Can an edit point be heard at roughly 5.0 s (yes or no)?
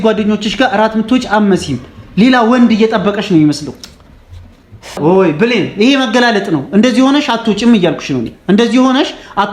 yes